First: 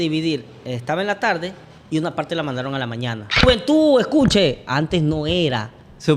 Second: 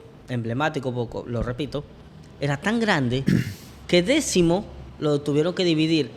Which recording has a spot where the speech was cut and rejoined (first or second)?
first